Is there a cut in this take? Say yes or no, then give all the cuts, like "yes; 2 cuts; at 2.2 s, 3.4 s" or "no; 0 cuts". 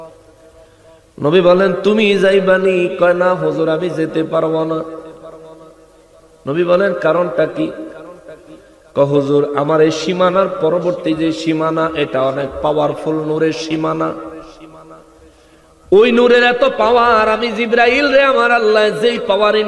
no; 0 cuts